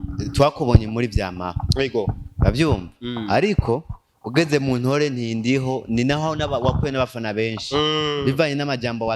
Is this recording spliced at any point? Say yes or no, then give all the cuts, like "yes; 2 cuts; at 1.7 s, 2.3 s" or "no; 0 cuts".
no; 0 cuts